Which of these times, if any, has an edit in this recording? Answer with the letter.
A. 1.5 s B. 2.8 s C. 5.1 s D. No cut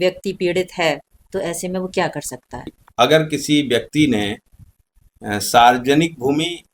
B